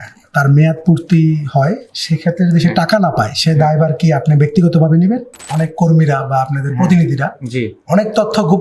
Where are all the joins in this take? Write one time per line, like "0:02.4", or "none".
0:05.5